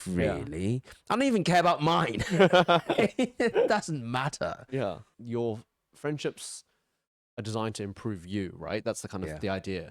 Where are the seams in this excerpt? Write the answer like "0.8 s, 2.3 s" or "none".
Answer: 5.2 s